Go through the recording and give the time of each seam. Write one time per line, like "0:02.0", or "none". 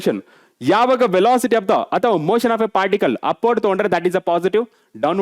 none